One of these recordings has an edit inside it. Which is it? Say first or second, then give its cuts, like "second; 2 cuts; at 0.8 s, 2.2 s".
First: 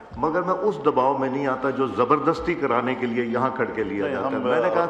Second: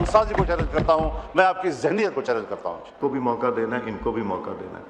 second; 1 cut; at 2.9 s